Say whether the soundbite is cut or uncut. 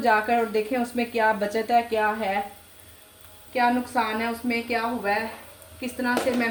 uncut